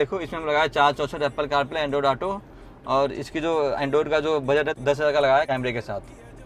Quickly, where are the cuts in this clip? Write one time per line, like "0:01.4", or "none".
0:04.7
0:05.5